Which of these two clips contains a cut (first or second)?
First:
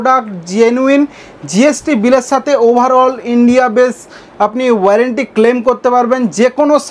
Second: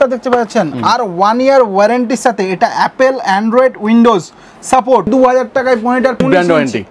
second